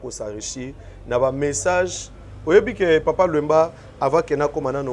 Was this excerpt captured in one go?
yes; 0 cuts

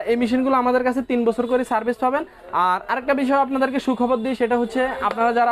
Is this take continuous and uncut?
yes; 0 cuts

